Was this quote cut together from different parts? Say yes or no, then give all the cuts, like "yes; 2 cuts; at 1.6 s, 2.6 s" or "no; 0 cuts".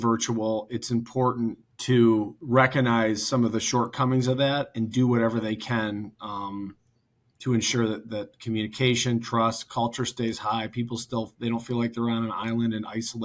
yes; 2 cuts; at 1.7 s, 2.4 s